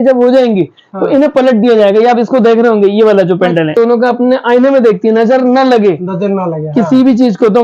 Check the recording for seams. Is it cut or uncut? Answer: cut